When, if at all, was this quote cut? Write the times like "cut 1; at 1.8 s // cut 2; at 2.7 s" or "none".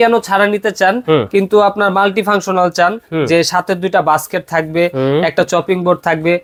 none